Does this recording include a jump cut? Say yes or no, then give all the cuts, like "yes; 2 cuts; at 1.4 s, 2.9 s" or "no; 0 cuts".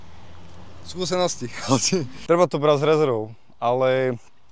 yes; 1 cut; at 2.2 s